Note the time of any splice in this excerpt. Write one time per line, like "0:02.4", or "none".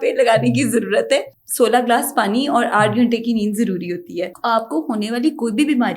0:01.4
0:04.3